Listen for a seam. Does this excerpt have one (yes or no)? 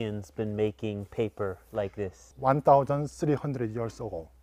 no